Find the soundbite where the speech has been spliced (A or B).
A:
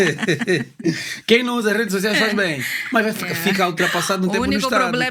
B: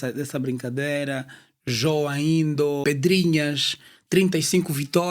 B